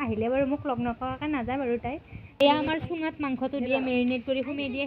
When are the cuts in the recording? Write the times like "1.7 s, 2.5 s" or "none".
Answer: 2.4 s